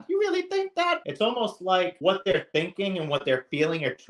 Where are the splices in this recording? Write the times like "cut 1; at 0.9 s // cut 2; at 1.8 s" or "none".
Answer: cut 1; at 1.0 s // cut 2; at 1.9 s